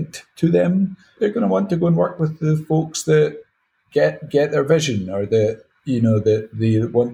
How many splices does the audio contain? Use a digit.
1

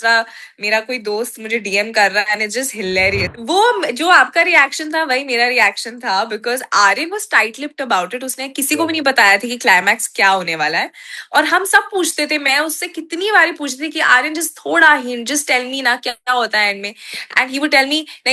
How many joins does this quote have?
1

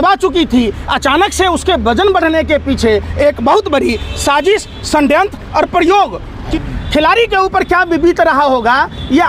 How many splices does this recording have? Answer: 1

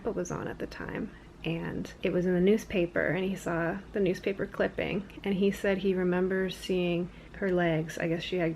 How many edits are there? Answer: 2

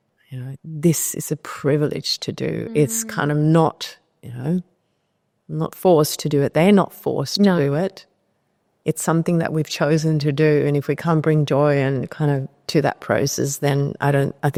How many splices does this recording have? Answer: 0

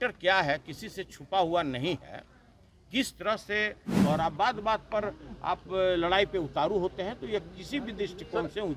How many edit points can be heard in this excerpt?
1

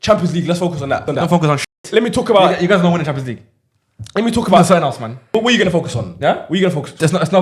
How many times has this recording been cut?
2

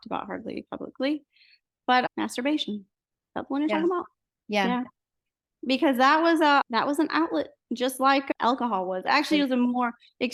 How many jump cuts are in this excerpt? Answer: 0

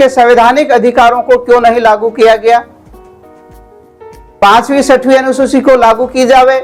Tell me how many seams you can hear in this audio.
0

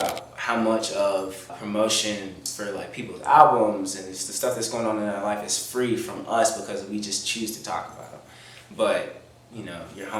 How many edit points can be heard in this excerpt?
1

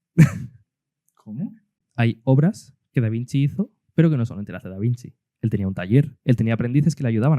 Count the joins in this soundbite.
3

